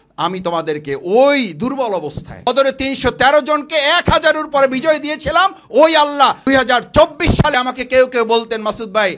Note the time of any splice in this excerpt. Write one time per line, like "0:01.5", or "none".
0:02.5
0:06.5
0:07.5